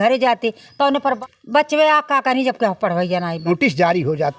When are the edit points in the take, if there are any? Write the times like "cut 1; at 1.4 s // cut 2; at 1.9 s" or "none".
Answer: cut 1; at 1.2 s // cut 2; at 3.5 s